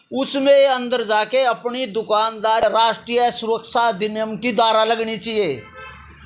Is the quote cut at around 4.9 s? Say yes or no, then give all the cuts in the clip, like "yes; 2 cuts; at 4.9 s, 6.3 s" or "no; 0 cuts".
no; 1 cut; at 2.6 s